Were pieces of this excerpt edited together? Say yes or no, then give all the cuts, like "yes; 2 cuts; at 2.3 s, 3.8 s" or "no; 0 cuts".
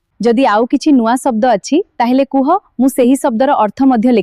no; 0 cuts